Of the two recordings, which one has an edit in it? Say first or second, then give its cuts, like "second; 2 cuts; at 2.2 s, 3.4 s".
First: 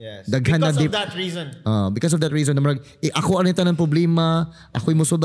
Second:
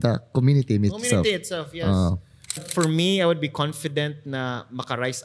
second; 1 cut; at 2.6 s